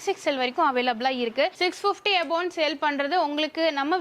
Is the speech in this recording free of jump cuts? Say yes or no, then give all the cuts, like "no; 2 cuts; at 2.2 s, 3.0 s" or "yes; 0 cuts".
no; 1 cut; at 1.5 s